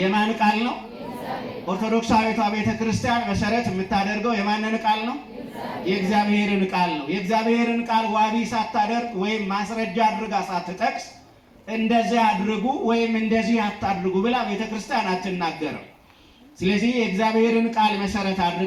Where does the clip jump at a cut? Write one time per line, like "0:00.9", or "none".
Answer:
none